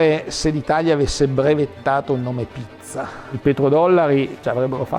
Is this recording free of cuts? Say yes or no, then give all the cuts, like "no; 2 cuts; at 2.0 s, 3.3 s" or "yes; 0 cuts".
yes; 0 cuts